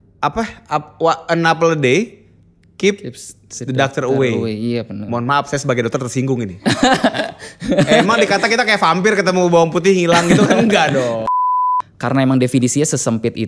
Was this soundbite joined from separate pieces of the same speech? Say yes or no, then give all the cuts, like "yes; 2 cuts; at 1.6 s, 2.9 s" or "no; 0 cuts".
yes; 1 cut; at 11.4 s